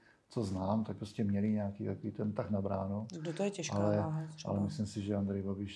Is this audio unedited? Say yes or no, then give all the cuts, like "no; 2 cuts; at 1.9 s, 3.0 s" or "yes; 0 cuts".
yes; 0 cuts